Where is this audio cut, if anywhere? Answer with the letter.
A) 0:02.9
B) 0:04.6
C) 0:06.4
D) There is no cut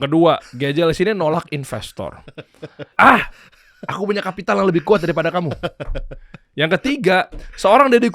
A